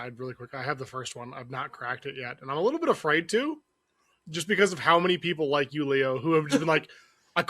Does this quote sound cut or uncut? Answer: uncut